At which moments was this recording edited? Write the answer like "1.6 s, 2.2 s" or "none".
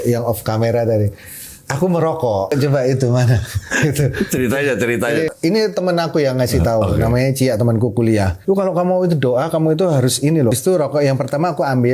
2.5 s, 5.3 s, 8.3 s, 10.5 s